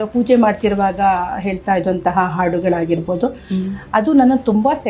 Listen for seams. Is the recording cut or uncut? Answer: uncut